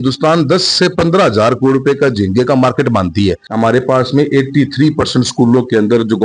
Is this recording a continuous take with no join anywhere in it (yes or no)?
no